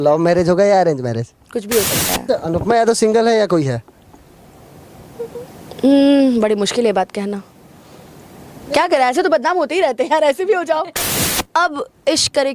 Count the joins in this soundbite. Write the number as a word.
two